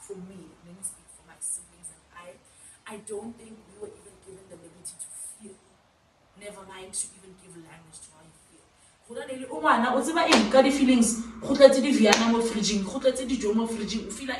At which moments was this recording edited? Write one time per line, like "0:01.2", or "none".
none